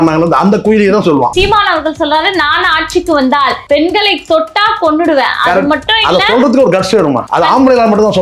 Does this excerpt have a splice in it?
yes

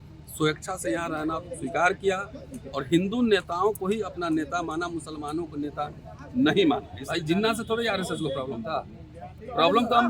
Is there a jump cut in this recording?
yes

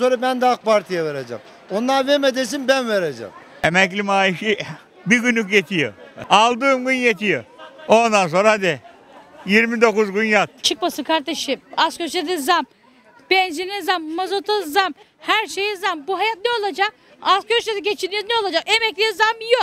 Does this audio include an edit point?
yes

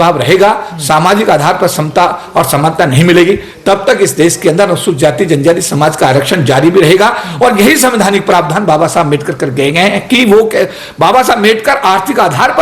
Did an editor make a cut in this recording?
no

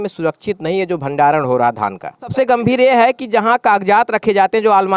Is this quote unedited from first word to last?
no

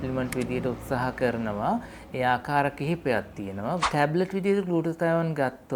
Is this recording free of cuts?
no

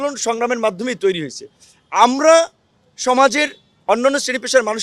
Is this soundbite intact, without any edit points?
yes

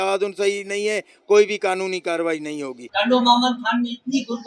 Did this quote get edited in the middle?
yes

